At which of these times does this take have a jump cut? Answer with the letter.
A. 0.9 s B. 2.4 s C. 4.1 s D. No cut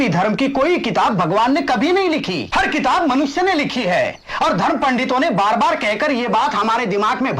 B